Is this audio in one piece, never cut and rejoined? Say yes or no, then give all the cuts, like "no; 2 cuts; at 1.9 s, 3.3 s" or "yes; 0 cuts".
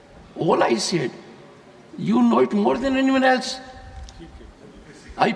yes; 0 cuts